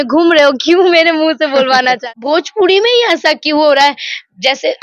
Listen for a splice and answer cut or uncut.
cut